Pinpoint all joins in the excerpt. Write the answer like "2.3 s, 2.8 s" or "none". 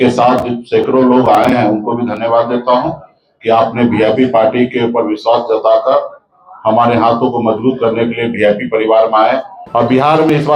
9.6 s